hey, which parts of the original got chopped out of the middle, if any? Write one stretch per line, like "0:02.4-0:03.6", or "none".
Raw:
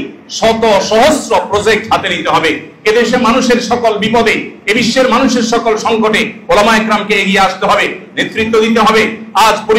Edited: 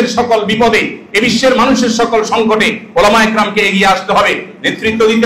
none